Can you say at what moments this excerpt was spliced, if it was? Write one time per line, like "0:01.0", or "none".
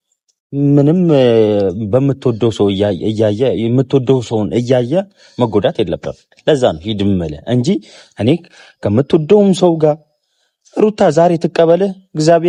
none